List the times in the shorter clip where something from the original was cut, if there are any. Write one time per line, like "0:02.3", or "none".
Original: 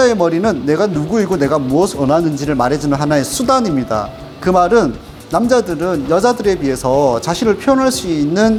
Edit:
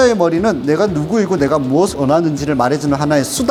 none